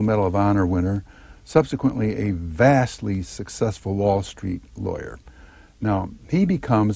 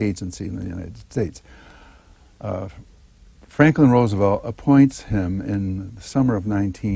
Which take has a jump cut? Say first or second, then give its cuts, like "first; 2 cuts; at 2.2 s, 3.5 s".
first; 1 cut; at 2.3 s